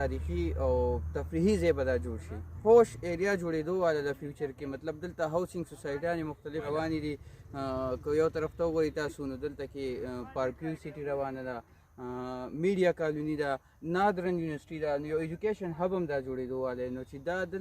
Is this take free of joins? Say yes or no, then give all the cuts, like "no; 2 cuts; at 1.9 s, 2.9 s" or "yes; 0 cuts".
no; 2 cuts; at 2.5 s, 6.6 s